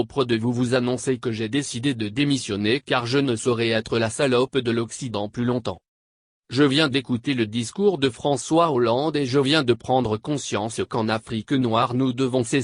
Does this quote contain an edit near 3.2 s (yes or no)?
no